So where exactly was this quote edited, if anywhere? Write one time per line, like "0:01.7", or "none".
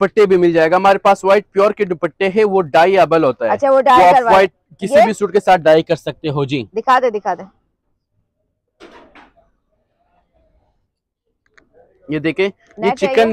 none

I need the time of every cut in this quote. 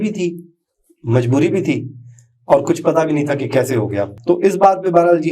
0:04.1

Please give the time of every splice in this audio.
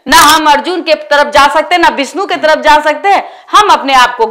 none

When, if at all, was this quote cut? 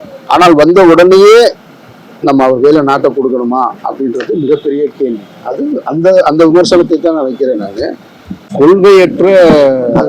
0:08.5

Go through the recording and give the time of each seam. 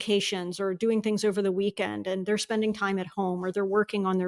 none

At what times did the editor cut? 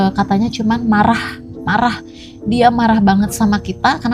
none

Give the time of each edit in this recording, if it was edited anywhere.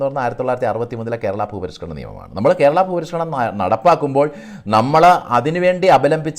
none

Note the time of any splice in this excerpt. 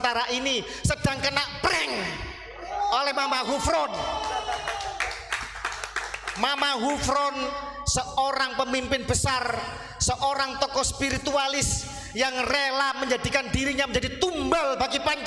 none

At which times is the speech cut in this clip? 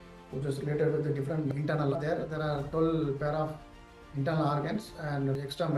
0:02.0

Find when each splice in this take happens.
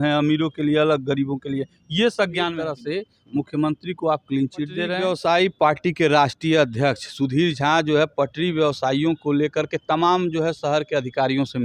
0:02.7
0:04.9

